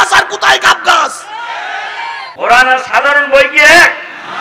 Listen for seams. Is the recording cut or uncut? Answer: cut